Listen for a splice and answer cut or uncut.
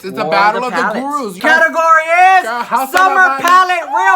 cut